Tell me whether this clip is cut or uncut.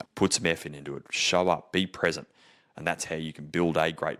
uncut